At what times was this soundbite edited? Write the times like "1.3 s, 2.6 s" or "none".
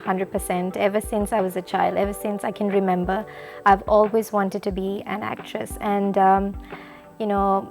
none